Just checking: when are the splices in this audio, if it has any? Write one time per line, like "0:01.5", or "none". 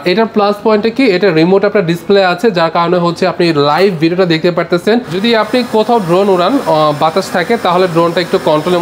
0:05.2

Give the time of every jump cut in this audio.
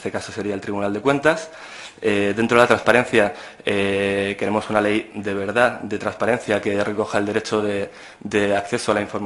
none

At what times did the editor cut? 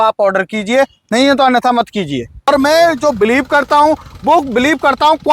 0:02.5

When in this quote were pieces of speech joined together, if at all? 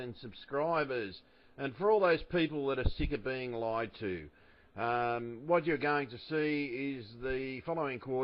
none

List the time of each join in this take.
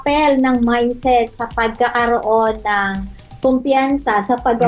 none

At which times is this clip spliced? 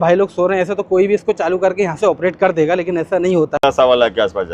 0:03.6

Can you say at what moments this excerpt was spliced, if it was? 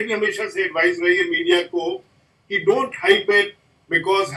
none

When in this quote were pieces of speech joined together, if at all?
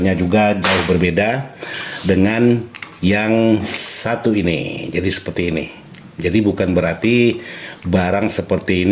none

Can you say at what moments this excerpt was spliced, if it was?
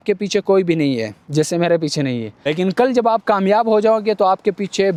none

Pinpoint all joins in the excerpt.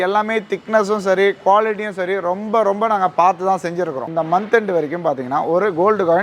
0:04.1

